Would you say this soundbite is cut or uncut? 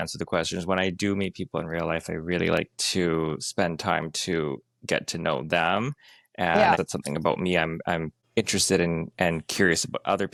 uncut